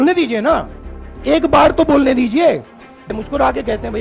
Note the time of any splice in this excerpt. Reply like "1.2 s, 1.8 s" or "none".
3.1 s